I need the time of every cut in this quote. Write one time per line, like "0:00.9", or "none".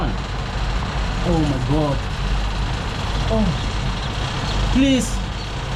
none